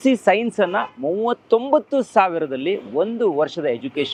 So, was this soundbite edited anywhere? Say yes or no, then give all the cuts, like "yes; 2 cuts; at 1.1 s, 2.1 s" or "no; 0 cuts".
no; 0 cuts